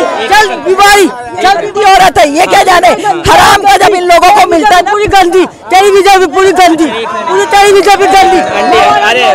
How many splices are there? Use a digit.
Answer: 0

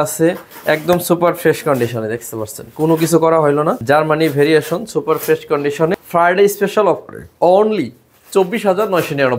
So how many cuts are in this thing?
2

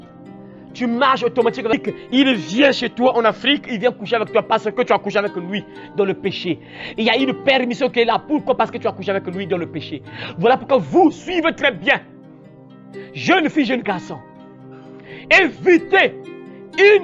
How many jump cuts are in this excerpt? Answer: 1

